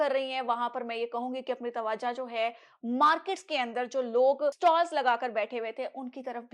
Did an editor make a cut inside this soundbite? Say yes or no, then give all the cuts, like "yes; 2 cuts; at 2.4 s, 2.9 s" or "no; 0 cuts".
yes; 1 cut; at 4.6 s